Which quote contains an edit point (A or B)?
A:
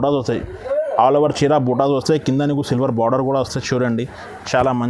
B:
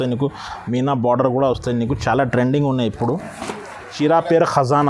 B